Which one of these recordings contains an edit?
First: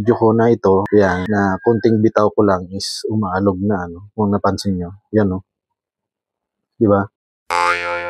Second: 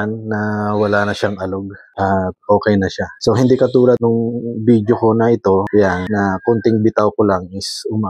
first; 1 cut; at 7.1 s

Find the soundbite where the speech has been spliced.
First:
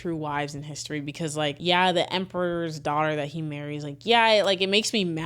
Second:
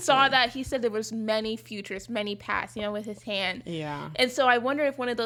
first; 1 cut; at 1.6 s

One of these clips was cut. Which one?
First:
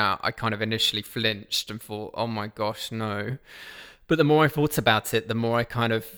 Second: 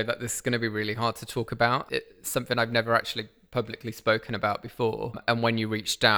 second; 2 cuts; at 1.8 s, 5.2 s

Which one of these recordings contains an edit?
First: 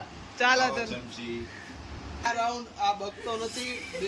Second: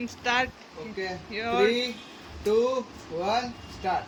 first; 1 cut; at 2.2 s

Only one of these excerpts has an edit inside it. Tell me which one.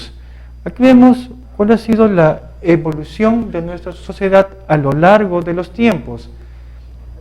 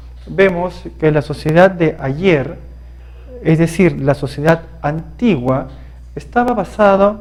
first; 1 cut; at 3.0 s

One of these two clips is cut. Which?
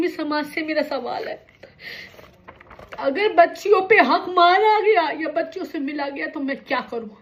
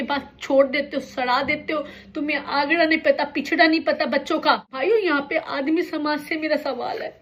second; 1 cut; at 4.7 s

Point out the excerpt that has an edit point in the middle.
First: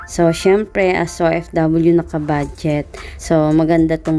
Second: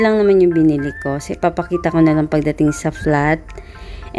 first; 1 cut; at 2.8 s

